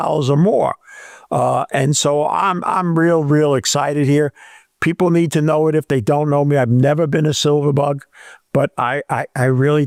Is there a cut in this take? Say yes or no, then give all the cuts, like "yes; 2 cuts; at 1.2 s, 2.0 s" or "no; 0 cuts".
no; 0 cuts